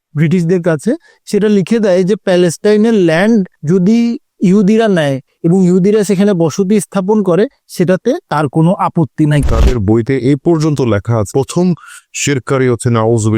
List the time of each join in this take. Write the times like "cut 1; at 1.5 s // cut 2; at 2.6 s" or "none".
cut 1; at 1.1 s // cut 2; at 9.4 s